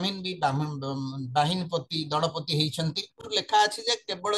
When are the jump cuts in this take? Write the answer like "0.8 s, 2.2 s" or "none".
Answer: 3.3 s